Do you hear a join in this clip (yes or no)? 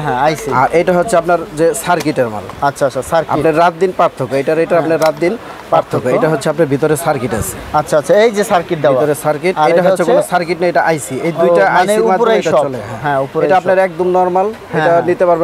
no